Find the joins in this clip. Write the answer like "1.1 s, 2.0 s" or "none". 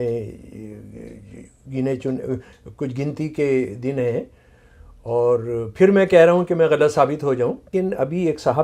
7.7 s